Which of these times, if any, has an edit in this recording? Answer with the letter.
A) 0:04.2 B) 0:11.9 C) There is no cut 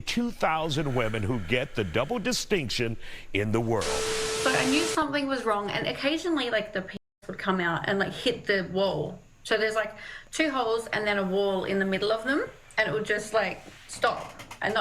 A